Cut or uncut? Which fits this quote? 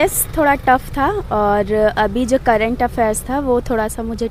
uncut